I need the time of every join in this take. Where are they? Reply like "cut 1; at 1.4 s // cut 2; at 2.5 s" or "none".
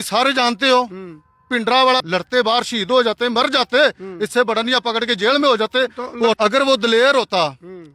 cut 1; at 2.0 s // cut 2; at 6.4 s